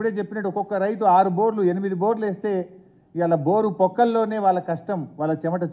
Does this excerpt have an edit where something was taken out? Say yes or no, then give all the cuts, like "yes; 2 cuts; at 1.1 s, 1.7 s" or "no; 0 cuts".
no; 0 cuts